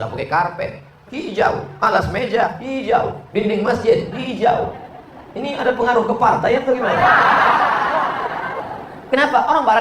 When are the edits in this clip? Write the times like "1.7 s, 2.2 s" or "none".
8.6 s